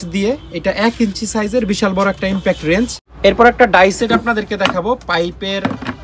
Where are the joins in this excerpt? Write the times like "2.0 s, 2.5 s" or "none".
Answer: 3.0 s